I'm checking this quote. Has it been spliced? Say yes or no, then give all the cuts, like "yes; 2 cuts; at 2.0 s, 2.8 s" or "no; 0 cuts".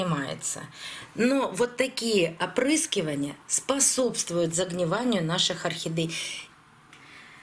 yes; 1 cut; at 6.3 s